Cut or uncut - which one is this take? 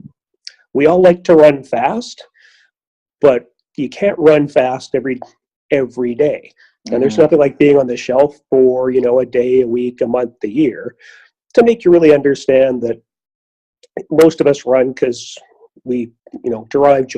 cut